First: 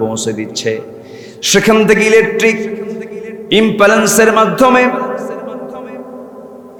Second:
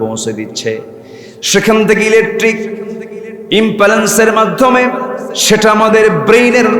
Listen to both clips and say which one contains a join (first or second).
second